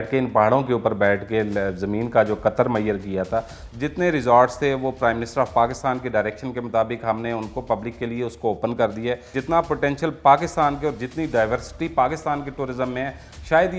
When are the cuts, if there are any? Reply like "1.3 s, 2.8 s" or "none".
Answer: 3.6 s, 9.3 s